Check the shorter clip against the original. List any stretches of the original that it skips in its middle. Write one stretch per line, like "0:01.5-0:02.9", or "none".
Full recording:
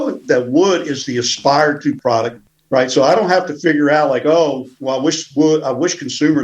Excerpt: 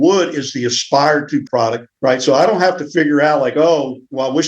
0:02.0-0:02.2